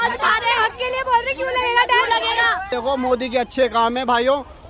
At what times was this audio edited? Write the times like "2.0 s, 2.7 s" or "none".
2.7 s